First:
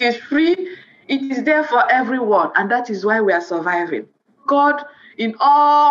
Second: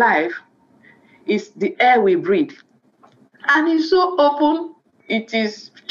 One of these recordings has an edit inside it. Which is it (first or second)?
first